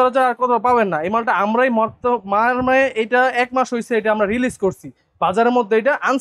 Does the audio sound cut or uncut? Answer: uncut